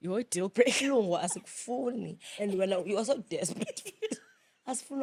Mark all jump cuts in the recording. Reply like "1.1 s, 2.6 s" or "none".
none